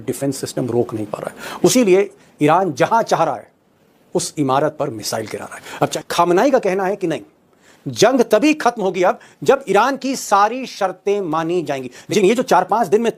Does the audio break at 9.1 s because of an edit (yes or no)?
no